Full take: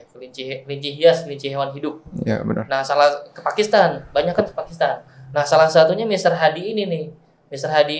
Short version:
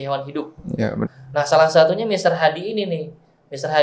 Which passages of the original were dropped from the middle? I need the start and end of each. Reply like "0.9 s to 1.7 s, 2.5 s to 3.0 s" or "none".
2.6 s to 5.1 s